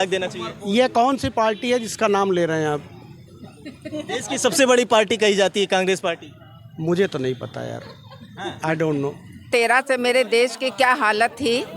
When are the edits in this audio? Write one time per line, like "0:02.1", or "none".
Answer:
0:09.5